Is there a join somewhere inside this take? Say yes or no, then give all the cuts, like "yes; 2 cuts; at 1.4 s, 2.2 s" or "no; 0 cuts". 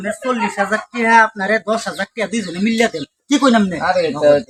no; 0 cuts